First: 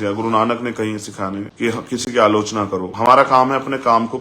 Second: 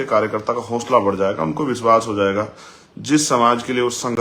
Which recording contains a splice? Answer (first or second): first